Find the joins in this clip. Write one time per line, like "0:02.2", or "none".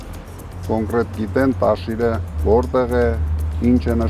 0:02.3